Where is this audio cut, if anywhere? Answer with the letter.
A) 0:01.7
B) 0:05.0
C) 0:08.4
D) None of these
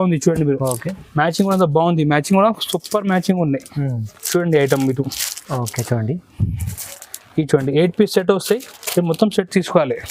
D